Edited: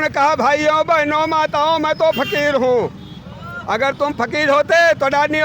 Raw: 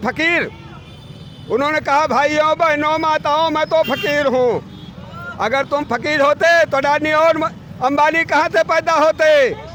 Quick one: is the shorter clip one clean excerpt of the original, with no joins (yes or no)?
yes